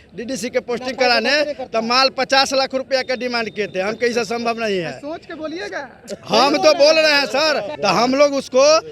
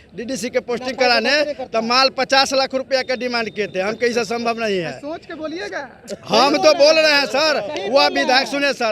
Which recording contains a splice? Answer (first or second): first